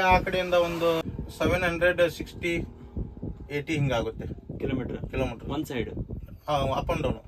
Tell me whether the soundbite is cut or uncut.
cut